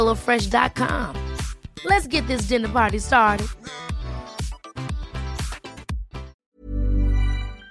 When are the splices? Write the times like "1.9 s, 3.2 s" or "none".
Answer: 6.4 s